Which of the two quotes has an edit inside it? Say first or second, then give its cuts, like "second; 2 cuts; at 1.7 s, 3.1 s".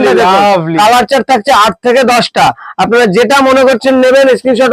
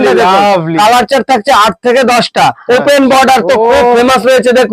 second; 1 cut; at 2.6 s